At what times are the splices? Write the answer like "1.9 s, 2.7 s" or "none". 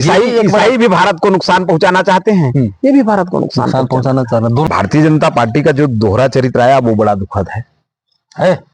4.7 s